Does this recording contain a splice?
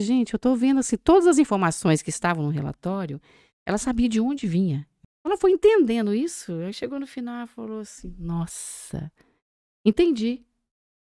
yes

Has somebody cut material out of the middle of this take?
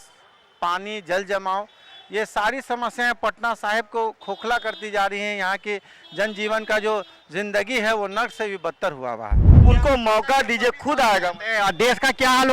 yes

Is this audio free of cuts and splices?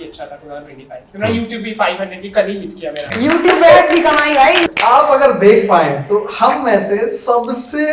no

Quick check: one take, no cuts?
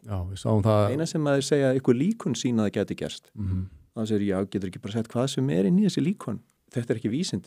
no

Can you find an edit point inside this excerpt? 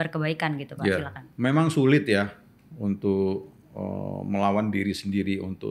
yes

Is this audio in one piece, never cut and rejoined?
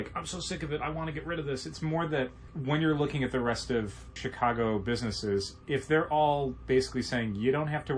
no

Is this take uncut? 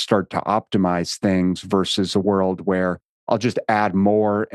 no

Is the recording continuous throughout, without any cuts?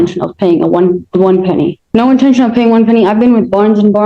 no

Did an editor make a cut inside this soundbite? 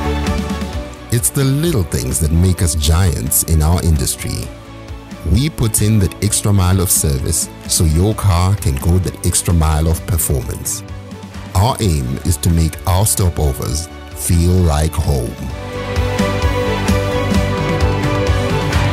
no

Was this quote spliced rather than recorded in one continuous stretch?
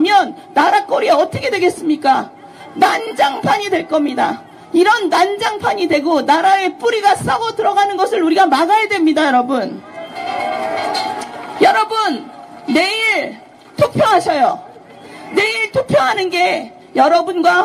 no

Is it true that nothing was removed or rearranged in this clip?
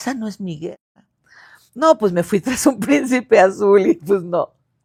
yes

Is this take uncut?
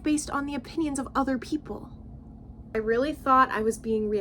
no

